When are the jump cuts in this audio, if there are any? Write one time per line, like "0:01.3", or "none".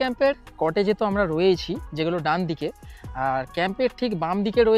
none